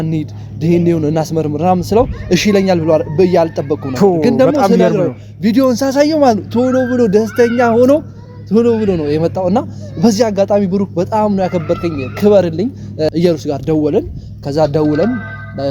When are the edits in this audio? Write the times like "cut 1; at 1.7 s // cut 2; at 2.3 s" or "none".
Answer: cut 1; at 13.1 s